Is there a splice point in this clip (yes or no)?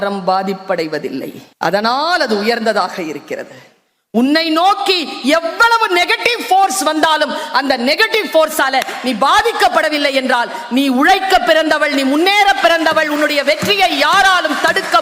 yes